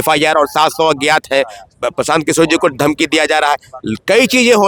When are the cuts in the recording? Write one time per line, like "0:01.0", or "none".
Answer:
none